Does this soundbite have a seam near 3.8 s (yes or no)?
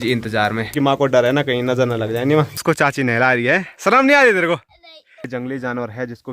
no